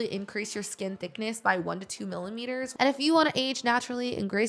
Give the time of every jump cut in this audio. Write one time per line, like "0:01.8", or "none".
0:02.7